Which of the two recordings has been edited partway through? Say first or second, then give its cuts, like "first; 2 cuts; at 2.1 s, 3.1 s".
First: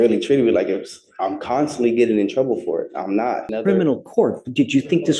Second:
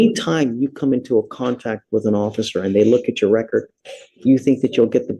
first; 1 cut; at 3.5 s